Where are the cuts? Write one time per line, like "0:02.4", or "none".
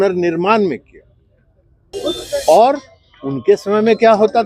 0:01.9